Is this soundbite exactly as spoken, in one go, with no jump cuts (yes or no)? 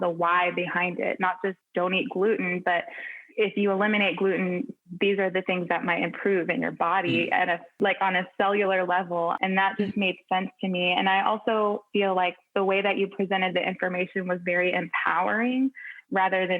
no